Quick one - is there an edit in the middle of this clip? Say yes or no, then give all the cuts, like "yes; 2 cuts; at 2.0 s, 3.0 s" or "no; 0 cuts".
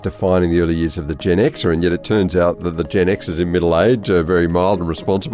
no; 0 cuts